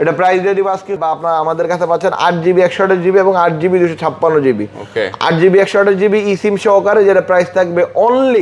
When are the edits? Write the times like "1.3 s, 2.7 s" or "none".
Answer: 1.0 s